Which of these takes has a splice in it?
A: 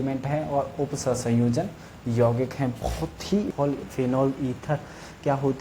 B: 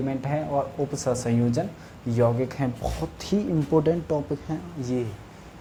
A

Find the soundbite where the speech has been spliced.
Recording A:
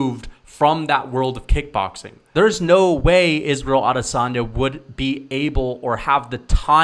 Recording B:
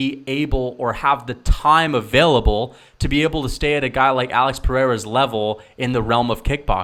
A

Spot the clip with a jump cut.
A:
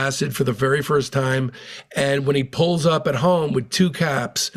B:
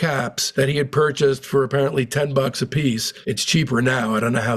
B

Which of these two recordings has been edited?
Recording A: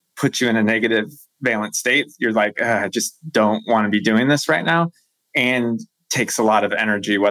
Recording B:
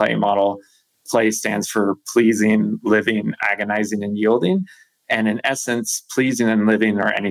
B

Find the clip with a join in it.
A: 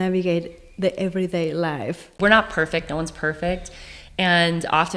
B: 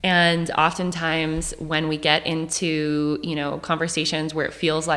A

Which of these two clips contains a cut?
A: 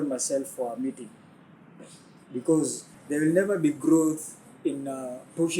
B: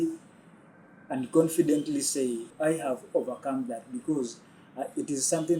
A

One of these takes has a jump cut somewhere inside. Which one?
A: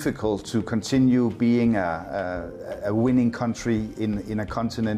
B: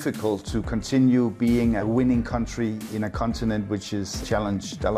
B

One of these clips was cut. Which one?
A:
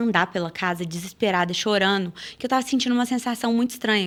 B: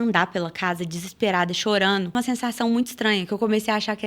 B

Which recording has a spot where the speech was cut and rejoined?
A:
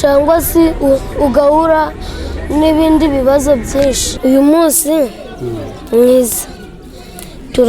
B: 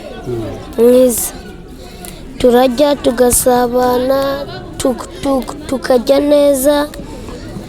A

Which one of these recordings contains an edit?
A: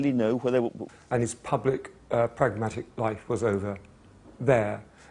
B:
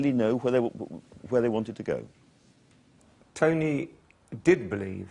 B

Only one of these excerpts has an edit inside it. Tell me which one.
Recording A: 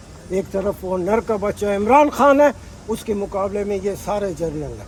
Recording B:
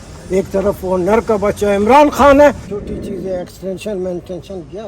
B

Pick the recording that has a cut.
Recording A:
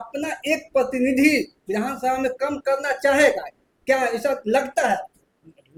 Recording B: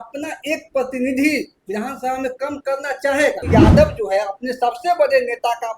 B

